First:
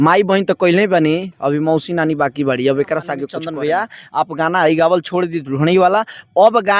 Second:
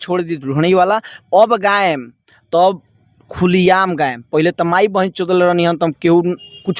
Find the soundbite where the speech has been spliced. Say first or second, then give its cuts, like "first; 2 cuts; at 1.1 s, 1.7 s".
first; 1 cut; at 3.3 s